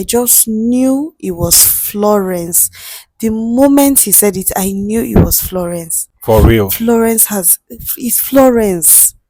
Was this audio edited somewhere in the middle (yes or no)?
no